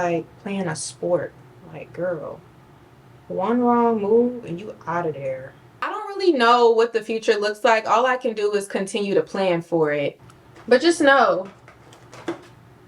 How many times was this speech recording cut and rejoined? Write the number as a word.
two